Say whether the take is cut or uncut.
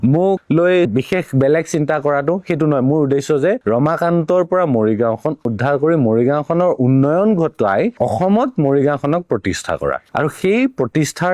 cut